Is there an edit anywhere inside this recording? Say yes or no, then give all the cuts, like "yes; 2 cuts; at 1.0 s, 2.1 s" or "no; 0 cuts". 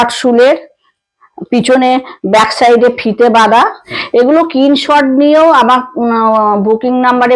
yes; 1 cut; at 3.9 s